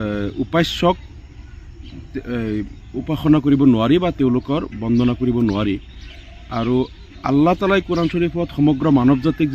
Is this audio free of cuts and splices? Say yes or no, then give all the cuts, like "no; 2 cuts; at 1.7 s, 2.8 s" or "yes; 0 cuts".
yes; 0 cuts